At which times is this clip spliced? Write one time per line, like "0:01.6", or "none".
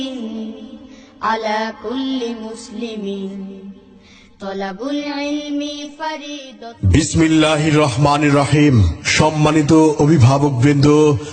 0:01.3